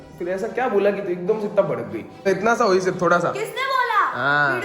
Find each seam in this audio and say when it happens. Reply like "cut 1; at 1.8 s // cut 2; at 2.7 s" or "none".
cut 1; at 2.2 s